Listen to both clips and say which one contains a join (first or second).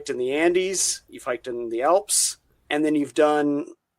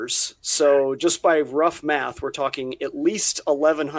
first